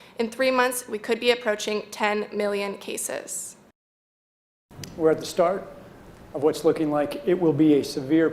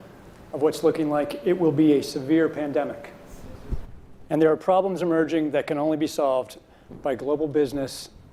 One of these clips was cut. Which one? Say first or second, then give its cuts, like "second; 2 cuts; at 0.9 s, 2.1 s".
first; 1 cut; at 4.1 s